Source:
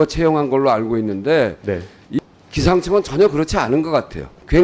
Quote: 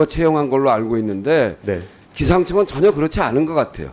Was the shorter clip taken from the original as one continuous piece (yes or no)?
no